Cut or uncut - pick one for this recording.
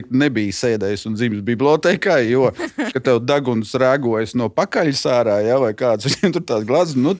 uncut